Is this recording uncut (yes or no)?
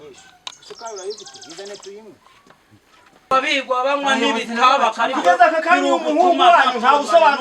no